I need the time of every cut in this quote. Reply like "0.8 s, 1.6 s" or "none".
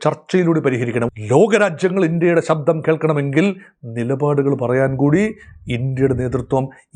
1.1 s